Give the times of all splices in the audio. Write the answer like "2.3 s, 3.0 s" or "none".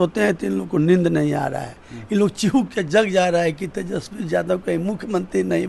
none